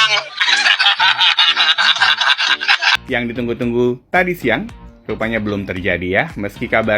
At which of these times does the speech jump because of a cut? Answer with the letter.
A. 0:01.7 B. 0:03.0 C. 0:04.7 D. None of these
B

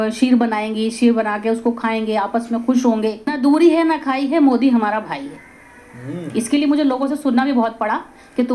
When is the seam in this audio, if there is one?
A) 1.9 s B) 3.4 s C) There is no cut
B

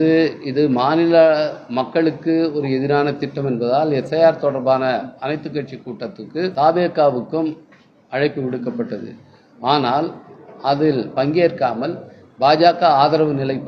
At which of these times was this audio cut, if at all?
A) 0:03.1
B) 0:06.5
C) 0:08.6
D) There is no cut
B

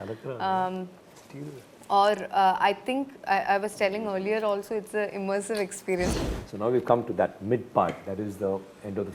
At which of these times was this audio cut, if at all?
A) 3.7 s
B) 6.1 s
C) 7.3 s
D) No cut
B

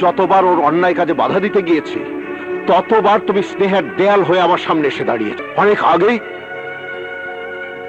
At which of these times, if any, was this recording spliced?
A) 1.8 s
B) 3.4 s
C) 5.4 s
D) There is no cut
C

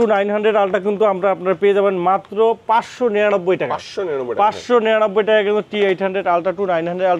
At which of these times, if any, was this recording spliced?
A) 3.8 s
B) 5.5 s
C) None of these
C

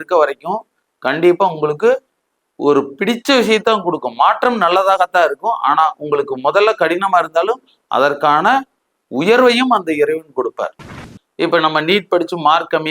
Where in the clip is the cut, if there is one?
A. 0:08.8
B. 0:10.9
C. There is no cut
B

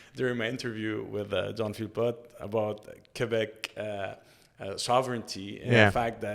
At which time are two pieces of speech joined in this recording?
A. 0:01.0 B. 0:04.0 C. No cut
C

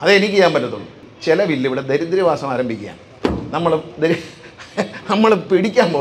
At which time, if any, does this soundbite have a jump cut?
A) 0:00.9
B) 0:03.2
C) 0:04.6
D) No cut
A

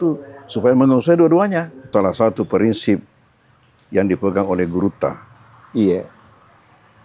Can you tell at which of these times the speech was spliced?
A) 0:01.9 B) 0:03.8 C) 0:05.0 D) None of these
A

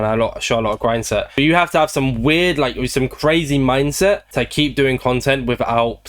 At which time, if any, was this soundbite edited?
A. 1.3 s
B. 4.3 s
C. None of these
C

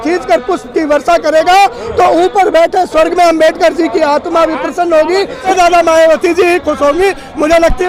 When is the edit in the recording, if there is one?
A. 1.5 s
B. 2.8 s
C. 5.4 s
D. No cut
C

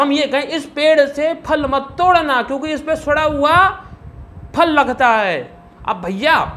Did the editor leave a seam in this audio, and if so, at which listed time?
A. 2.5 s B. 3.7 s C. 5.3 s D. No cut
D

